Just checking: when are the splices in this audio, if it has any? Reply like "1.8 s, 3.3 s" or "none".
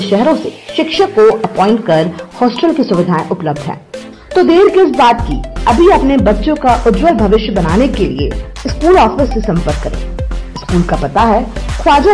none